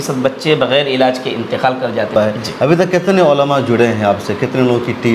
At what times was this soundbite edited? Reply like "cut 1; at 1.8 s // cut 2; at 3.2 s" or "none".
cut 1; at 2.1 s